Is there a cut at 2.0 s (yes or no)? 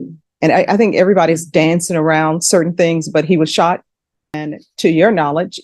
no